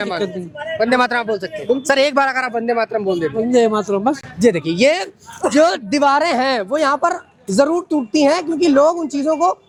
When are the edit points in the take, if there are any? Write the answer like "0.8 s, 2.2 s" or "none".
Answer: none